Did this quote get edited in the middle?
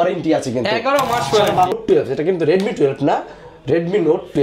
yes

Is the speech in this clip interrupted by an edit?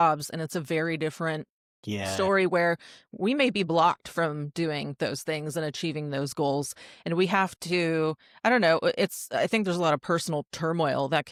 no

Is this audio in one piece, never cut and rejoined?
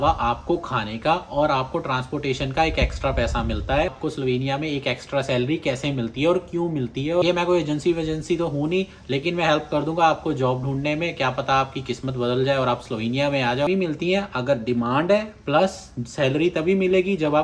no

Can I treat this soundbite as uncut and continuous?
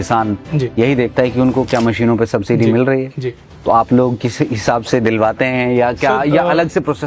yes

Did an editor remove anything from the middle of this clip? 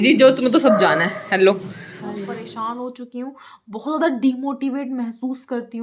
yes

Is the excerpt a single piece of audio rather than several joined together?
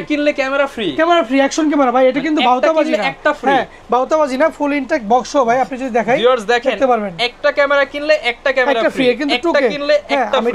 yes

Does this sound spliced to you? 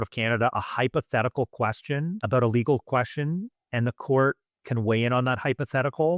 yes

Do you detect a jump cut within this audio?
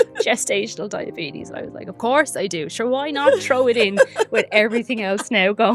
no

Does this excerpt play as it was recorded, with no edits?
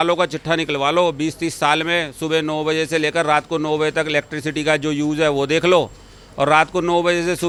yes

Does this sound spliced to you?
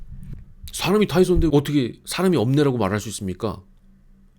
yes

